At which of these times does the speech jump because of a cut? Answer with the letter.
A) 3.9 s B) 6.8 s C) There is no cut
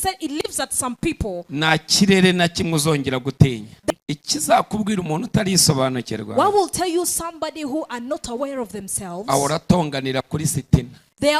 A